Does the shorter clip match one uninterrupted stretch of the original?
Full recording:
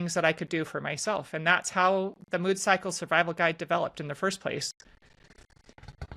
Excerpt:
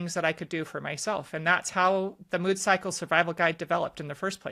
yes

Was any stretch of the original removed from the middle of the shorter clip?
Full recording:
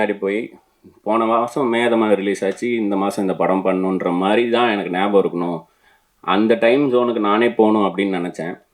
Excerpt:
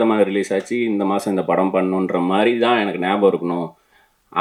no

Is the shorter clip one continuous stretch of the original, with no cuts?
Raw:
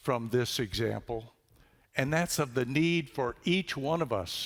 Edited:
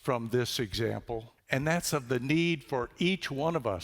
no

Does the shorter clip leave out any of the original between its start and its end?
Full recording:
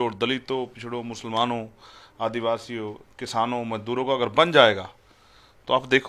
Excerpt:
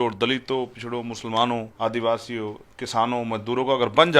yes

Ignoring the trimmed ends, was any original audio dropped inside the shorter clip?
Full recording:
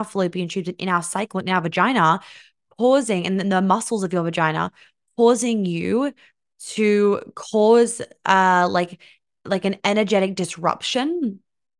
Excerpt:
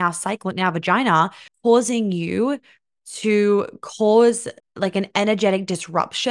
yes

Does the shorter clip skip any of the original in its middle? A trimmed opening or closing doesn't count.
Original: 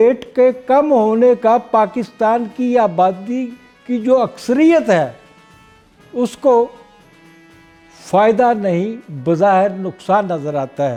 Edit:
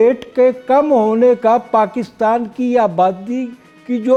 no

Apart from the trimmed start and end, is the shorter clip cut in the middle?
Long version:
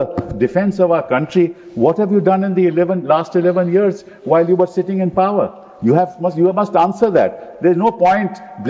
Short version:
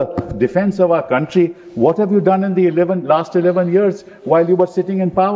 no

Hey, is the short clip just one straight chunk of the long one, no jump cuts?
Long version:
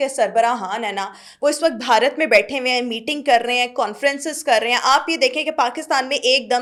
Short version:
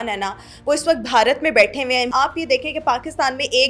no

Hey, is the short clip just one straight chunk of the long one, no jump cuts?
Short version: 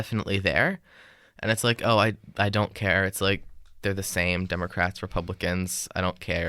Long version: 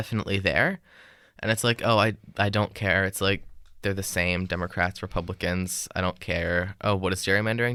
yes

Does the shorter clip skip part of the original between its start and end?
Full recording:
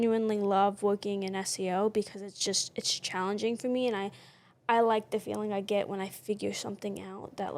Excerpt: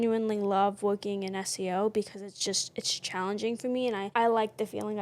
yes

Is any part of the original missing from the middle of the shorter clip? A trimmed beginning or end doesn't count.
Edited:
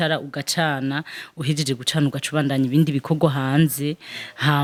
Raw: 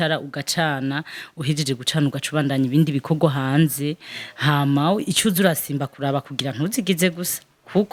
no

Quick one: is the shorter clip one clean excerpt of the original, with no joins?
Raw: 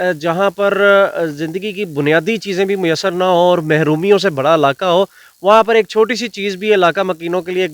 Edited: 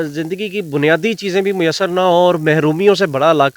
yes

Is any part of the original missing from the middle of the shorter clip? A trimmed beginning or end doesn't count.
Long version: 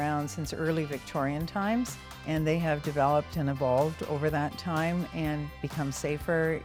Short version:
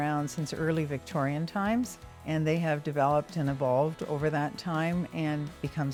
no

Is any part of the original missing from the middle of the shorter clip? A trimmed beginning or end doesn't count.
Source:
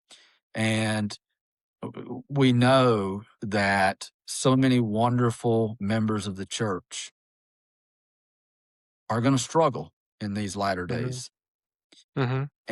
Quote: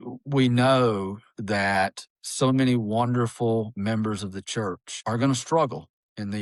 yes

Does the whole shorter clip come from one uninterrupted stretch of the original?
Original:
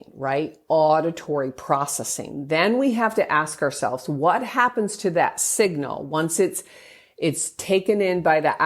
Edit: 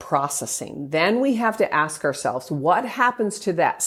yes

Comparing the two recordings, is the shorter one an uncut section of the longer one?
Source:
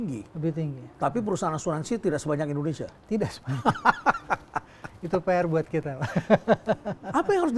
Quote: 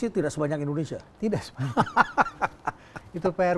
yes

